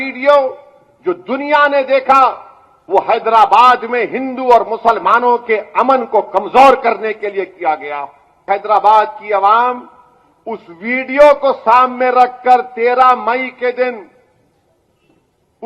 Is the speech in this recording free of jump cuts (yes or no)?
no